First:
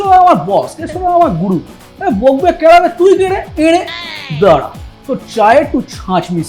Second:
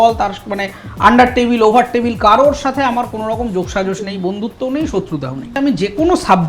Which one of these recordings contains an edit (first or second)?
second